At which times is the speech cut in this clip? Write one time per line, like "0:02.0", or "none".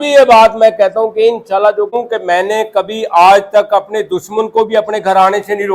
0:01.9